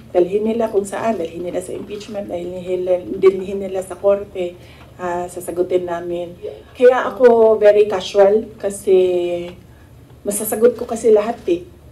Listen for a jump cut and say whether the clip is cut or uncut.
cut